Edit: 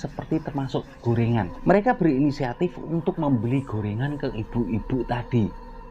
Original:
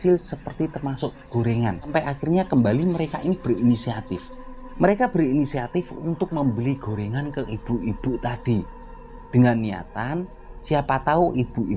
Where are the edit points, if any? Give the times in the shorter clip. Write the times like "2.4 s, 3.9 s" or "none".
1.5 s